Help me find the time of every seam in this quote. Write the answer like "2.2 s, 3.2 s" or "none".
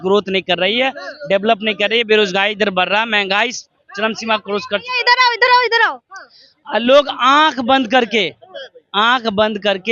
none